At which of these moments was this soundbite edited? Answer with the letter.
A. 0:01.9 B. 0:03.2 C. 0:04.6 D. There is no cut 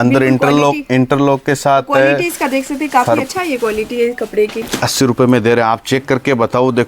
C